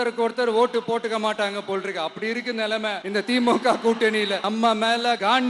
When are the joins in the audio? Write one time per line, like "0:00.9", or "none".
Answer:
0:04.4

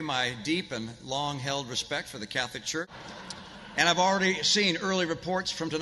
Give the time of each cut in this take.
none

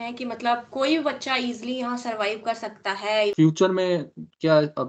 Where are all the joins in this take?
0:03.3

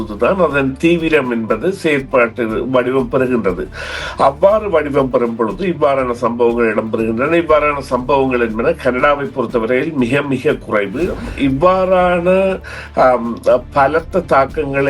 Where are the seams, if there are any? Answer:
0:11.3

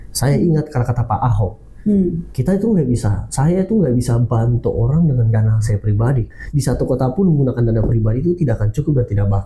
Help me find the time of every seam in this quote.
0:06.3

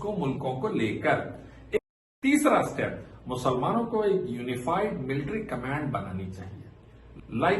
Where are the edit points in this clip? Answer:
0:01.8

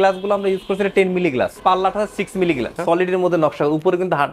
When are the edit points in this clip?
0:01.6
0:02.8

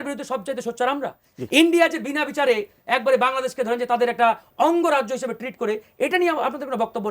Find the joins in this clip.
0:01.3

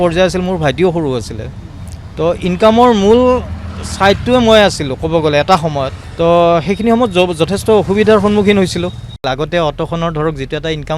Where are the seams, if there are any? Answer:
0:06.0
0:09.2

